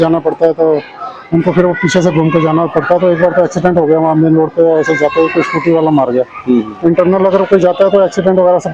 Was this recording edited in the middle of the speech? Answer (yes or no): no